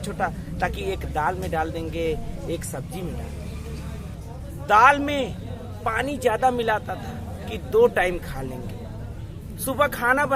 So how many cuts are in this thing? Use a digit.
1